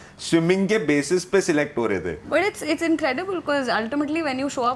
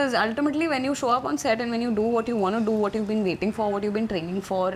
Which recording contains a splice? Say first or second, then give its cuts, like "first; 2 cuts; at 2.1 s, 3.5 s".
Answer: first; 1 cut; at 2.2 s